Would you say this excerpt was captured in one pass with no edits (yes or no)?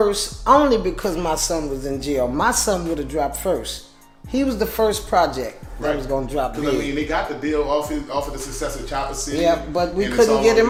yes